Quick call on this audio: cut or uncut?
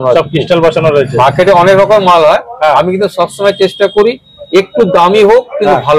uncut